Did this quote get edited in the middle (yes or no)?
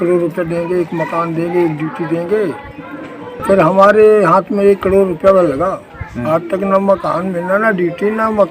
yes